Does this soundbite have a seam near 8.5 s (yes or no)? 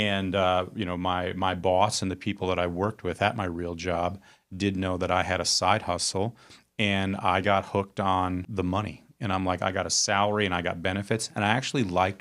yes